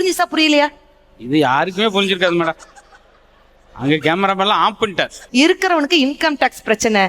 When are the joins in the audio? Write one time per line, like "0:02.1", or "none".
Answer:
0:05.2